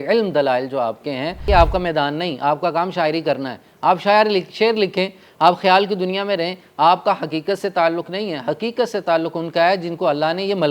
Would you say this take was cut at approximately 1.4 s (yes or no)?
yes